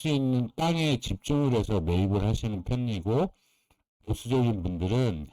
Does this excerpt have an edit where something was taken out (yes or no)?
no